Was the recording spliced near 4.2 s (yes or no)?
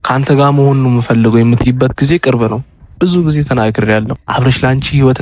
yes